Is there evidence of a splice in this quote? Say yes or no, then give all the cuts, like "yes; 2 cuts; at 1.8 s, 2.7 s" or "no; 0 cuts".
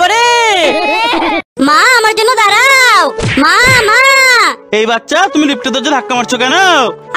yes; 1 cut; at 1.5 s